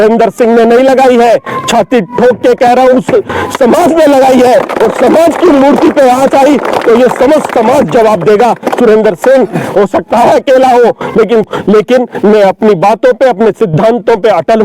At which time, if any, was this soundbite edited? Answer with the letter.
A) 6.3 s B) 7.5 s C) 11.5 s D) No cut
C